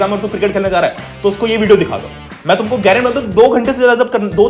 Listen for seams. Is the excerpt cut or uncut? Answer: uncut